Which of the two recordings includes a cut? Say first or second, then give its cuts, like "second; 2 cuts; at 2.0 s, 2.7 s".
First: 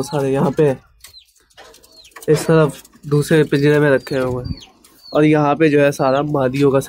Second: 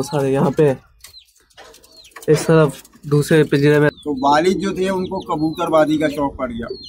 second; 1 cut; at 3.9 s